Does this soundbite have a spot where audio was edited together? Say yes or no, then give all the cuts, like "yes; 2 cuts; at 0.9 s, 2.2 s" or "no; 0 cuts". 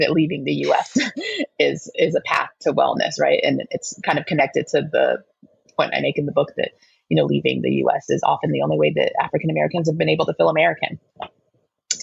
no; 0 cuts